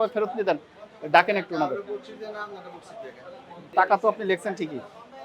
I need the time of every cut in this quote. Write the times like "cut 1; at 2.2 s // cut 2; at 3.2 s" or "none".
none